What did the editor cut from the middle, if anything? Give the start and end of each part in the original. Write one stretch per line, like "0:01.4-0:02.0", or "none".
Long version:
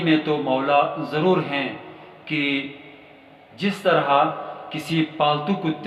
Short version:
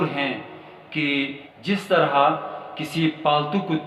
0:02.8-0:03.4